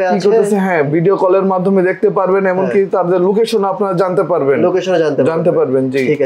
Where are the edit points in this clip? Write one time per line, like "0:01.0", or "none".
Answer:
none